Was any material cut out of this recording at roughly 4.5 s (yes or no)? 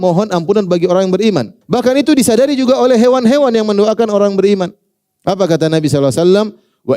no